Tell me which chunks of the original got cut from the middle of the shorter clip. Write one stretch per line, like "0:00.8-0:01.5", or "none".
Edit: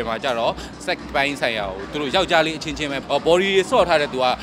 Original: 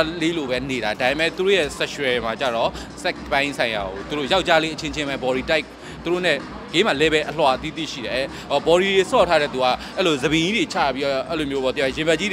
0:05.1-0:08.4